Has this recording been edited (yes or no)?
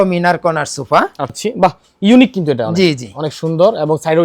yes